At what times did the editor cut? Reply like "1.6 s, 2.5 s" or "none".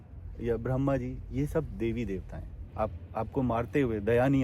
2.6 s